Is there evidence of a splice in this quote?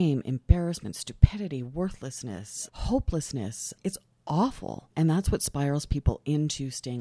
yes; 2 cuts; at 2.5 s, 3.7 s

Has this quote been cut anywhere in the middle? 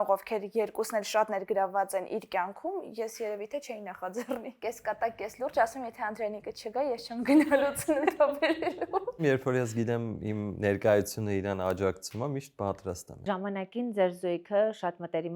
yes; 3 cuts; at 4.6 s, 9.2 s, 13.2 s

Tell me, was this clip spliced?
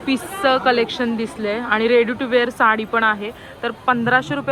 no; 0 cuts

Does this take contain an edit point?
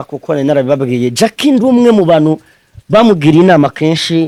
no; 0 cuts

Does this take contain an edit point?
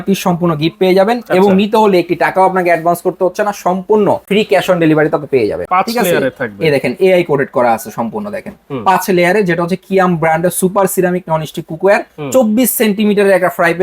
yes; 2 cuts; at 4.2 s, 5.6 s

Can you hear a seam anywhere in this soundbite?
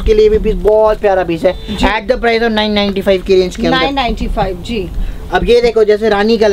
no; 0 cuts

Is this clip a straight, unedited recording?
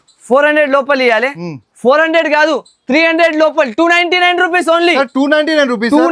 yes; 0 cuts

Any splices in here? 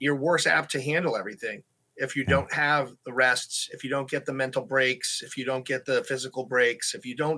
no; 0 cuts

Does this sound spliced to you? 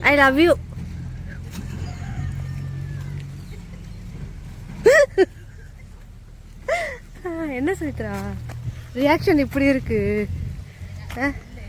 no; 0 cuts

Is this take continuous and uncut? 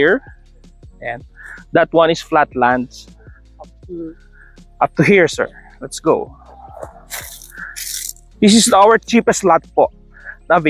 yes; 0 cuts

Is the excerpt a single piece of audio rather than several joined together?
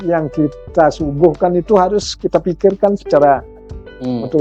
yes; 0 cuts

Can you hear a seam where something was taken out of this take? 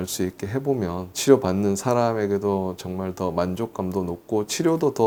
no; 0 cuts

